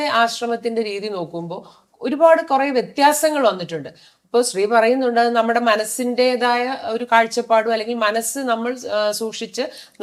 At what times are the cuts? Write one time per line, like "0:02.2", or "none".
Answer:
none